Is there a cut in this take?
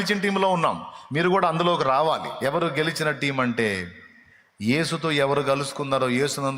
yes; 1 cut; at 2.5 s

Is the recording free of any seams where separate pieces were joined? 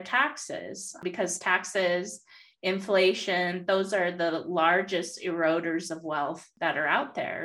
no; 2 cuts; at 1.0 s, 6.5 s

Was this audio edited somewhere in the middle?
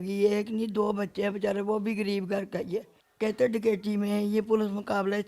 yes; 1 cut; at 3.0 s

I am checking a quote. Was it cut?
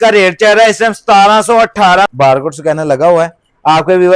yes; 1 cut; at 2.1 s

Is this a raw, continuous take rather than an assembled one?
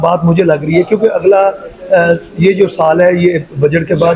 yes; 0 cuts

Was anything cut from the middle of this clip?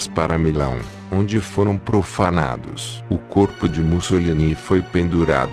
yes; 1 cut; at 4.2 s

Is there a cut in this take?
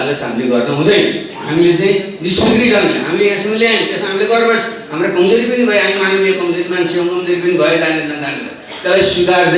no; 0 cuts

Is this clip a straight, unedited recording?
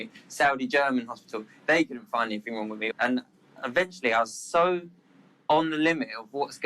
no; 1 cut; at 2.8 s

